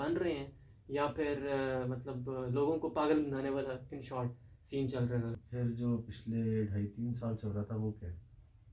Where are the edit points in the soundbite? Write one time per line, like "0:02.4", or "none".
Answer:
0:05.4